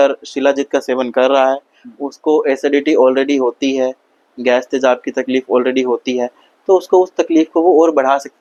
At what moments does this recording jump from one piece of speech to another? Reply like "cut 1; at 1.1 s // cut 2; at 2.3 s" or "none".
none